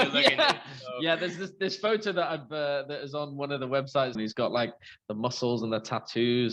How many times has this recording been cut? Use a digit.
1